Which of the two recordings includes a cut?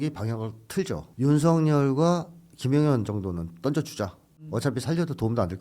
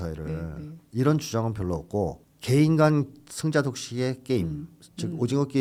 first; 1 cut; at 1.1 s

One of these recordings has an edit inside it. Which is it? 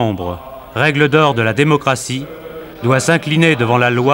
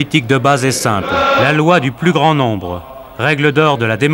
second; 1 cut; at 1.4 s

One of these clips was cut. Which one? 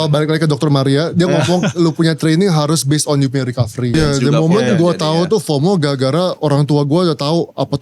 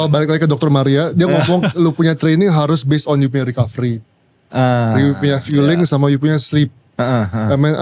first; 1 cut; at 3.9 s

